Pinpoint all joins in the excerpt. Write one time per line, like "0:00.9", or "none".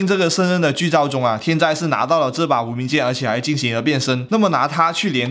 none